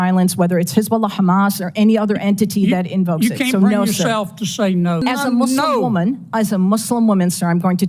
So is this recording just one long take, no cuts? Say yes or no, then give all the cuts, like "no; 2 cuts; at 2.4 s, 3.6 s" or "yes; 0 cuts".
no; 1 cut; at 5.0 s